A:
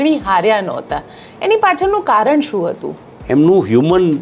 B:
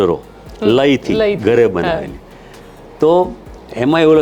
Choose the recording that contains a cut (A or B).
A